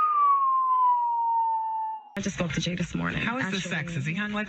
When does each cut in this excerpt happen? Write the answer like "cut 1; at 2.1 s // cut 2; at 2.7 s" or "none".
cut 1; at 2.2 s